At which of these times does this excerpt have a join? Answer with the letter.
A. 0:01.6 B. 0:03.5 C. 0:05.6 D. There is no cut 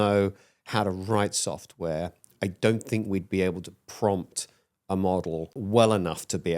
C